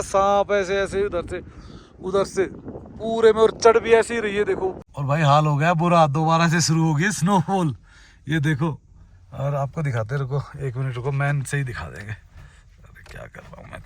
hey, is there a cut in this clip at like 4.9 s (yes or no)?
yes